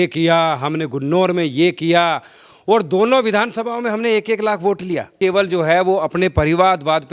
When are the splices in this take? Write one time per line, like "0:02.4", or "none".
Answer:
0:05.2